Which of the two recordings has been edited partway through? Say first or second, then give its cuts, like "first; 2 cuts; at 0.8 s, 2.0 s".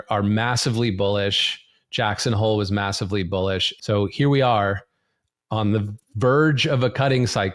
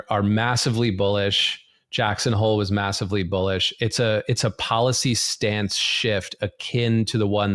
first; 1 cut; at 3.7 s